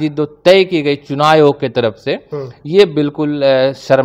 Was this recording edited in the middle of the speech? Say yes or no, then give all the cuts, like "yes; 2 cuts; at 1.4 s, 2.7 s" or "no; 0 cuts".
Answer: no; 0 cuts